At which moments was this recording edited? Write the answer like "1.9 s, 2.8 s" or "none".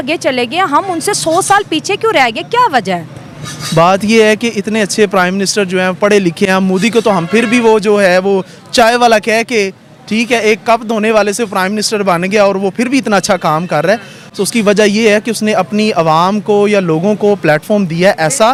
none

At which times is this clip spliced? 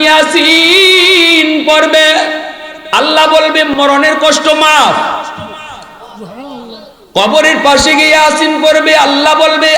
3.7 s

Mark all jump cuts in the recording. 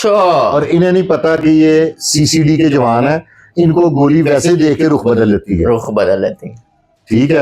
none

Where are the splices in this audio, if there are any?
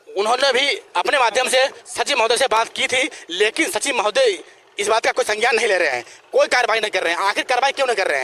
none

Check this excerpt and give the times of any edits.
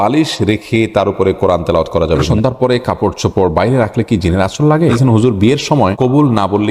2.2 s, 4.9 s, 5.9 s

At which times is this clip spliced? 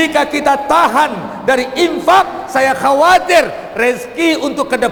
none

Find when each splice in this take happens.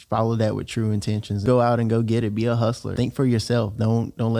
1.4 s, 2.9 s

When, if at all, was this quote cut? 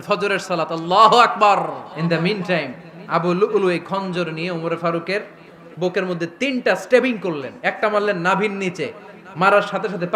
1.9 s

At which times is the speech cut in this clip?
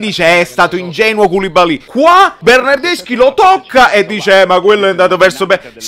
2.1 s

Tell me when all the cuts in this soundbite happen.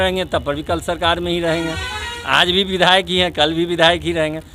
none

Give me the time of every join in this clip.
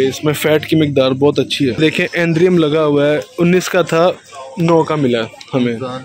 1.8 s

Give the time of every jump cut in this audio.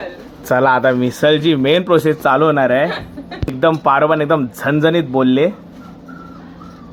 none

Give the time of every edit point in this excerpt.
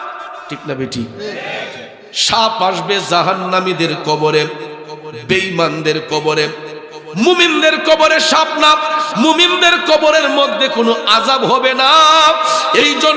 none

